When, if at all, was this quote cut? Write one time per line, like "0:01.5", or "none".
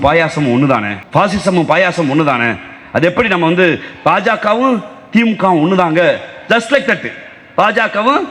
none